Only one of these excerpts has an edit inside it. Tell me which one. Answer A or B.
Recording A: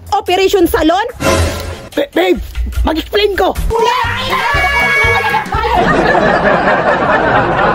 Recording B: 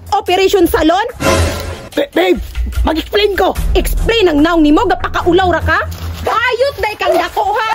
A